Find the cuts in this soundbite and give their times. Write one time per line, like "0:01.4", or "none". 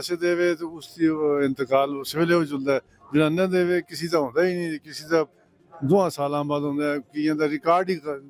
none